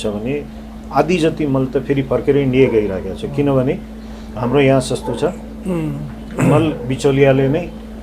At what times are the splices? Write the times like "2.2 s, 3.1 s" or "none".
none